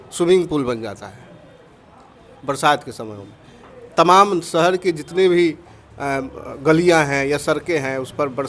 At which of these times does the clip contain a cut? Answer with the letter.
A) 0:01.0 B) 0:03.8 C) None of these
C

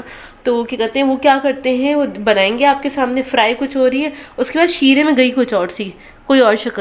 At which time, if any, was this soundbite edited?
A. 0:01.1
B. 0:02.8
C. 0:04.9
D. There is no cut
D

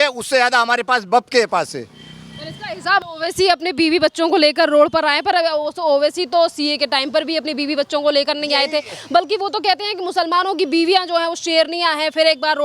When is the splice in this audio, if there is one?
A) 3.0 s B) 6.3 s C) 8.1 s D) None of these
A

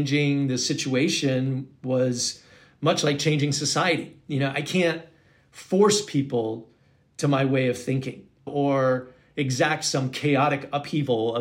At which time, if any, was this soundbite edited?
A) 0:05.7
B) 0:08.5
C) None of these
B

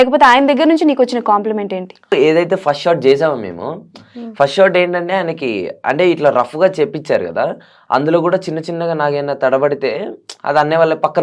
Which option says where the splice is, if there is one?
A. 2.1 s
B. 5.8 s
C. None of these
A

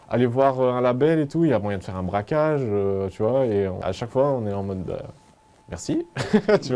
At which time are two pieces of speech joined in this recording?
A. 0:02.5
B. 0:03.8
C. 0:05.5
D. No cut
B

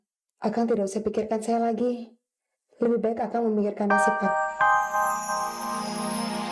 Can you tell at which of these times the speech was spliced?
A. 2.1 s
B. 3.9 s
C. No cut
B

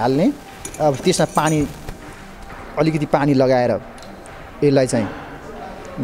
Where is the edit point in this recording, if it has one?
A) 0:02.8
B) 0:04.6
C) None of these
C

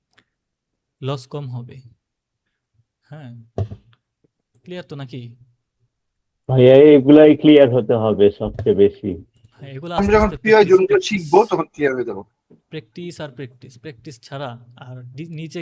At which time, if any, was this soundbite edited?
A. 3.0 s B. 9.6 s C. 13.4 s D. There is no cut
D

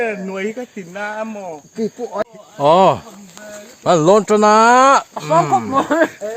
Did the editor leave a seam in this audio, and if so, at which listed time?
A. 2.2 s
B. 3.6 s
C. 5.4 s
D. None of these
A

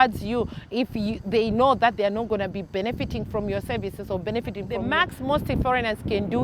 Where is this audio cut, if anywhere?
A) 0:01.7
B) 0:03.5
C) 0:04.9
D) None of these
C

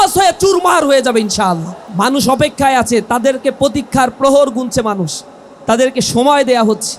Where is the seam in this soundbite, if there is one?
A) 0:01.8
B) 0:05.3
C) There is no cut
A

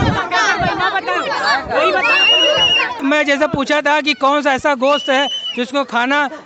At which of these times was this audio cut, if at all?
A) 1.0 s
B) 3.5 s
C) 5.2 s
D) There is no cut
D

